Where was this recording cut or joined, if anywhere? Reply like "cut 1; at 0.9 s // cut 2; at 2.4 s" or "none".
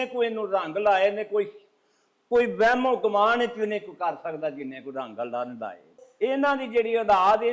cut 1; at 6.0 s